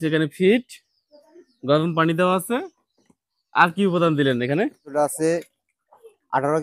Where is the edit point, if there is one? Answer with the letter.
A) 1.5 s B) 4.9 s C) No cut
B